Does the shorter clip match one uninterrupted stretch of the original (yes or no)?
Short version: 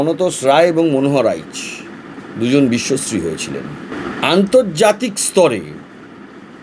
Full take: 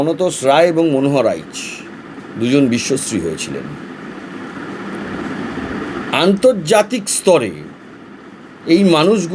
no